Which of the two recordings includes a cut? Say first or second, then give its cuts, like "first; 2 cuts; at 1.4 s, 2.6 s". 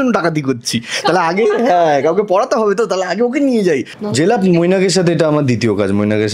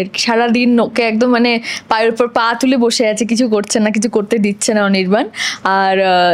first; 1 cut; at 3.9 s